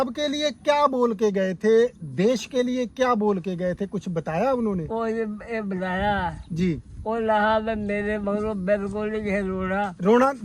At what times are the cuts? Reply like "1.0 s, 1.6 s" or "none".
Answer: none